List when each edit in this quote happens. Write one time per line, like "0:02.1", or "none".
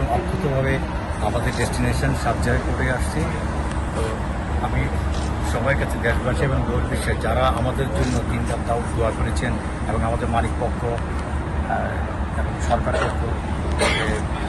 none